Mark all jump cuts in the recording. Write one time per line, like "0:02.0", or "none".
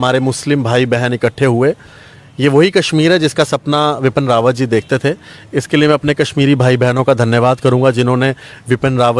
none